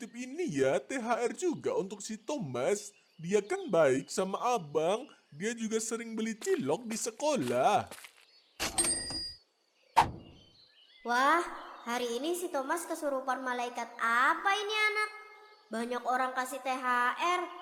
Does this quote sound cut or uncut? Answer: uncut